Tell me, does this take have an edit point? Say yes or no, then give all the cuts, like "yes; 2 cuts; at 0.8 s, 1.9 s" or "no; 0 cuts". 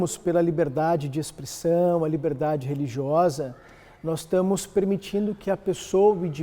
no; 0 cuts